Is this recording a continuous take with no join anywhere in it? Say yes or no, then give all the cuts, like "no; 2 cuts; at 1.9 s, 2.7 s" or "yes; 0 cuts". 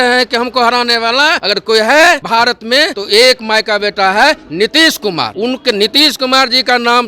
no; 3 cuts; at 1.4 s, 2.7 s, 5.3 s